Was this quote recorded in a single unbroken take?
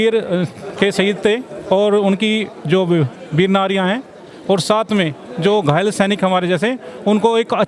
yes; 0 cuts

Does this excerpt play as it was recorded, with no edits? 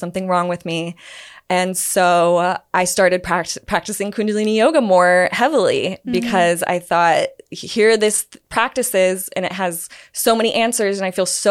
yes; 0 cuts

